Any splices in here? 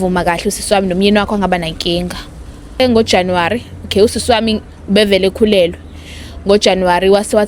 yes; 1 cut; at 2.8 s

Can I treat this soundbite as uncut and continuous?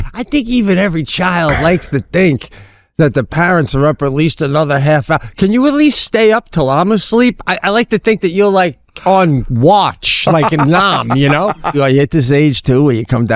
no; 1 cut; at 11.8 s

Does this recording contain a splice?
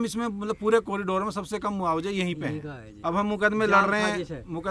yes; 1 cut; at 2.8 s

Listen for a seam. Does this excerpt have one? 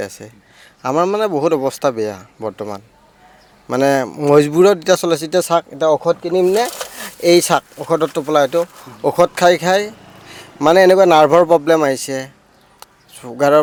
no; 0 cuts

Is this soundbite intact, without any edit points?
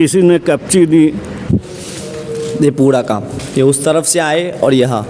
no; 1 cut; at 1.3 s

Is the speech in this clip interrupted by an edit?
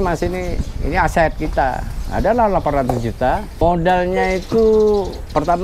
no; 0 cuts

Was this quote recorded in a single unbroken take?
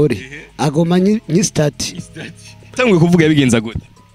no; 1 cut; at 2.7 s

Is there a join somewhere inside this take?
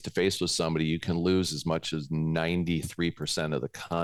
no; 0 cuts

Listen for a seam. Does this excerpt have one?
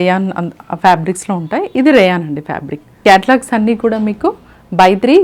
yes; 1 cut; at 3.0 s

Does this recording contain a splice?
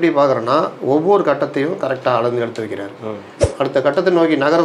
yes; 1 cut; at 3.3 s

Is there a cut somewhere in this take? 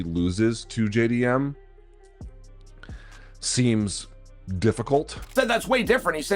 yes; 1 cut; at 5.3 s

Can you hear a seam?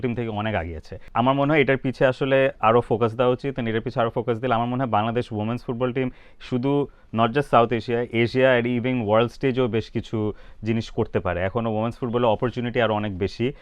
no; 0 cuts

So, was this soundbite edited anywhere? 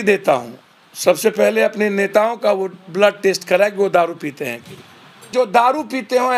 yes; 1 cut; at 5.2 s

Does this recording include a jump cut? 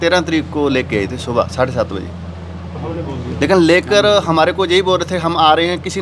no; 0 cuts

